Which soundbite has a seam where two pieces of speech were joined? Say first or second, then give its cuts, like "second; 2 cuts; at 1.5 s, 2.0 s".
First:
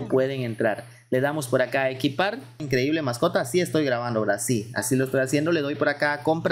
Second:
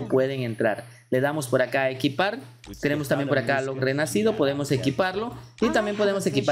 first; 1 cut; at 2.6 s